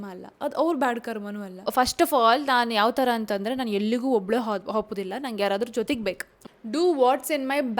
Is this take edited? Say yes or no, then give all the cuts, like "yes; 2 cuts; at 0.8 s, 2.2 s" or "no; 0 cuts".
yes; 2 cuts; at 1.5 s, 6.3 s